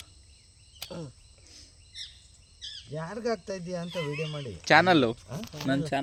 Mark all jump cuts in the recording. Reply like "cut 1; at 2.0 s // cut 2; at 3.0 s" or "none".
none